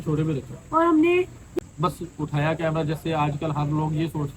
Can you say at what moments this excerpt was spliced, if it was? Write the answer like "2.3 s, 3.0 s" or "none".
1.4 s